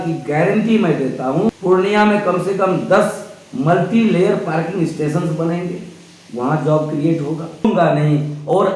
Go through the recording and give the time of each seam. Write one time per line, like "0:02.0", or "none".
0:01.5
0:07.6

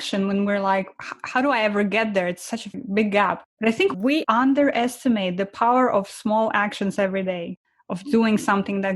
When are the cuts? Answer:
0:04.0
0:07.6

